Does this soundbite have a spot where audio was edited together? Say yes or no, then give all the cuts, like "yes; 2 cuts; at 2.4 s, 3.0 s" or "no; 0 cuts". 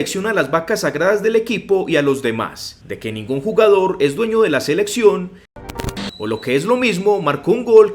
yes; 1 cut; at 5.6 s